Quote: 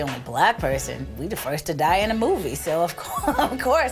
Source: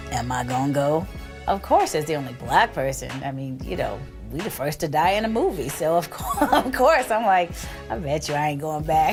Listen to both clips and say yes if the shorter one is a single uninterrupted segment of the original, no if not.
no